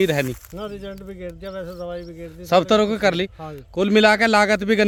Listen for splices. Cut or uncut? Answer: uncut